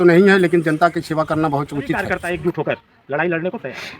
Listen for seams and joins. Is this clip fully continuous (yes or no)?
no